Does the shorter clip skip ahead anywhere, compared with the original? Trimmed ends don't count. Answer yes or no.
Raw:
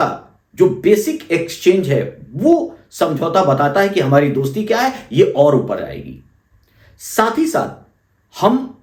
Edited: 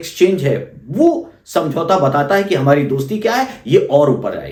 no